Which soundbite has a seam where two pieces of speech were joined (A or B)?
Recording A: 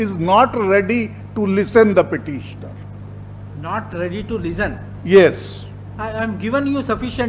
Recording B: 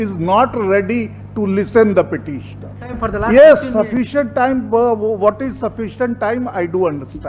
B